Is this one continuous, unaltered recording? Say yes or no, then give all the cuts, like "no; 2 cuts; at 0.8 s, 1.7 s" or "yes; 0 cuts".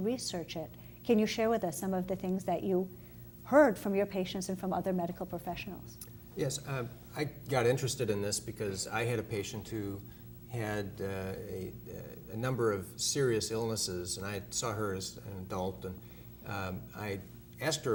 yes; 0 cuts